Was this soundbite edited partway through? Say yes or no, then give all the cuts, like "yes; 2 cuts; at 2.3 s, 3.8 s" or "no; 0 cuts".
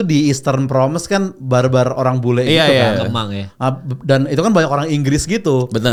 no; 0 cuts